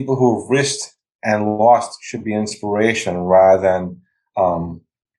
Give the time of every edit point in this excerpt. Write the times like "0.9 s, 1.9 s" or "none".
none